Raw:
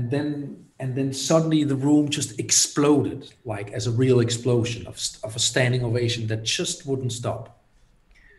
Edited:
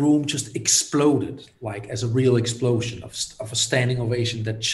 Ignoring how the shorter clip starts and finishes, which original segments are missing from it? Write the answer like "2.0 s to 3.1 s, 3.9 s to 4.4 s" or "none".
none